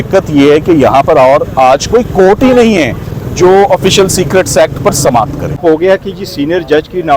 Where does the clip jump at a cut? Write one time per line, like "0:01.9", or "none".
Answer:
0:05.6